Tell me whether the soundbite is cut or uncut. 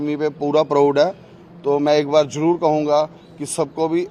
uncut